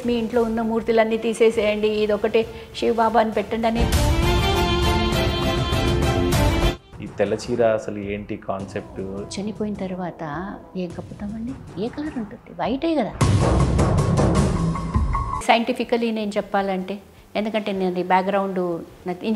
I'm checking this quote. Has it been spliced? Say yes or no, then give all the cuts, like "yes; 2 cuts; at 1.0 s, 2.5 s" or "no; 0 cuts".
yes; 1 cut; at 6.9 s